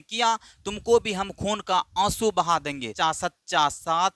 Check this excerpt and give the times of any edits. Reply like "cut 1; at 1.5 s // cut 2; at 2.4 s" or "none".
cut 1; at 2.9 s